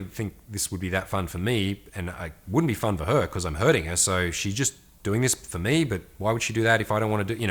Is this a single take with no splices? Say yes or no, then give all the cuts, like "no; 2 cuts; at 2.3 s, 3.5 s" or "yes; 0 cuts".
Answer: yes; 0 cuts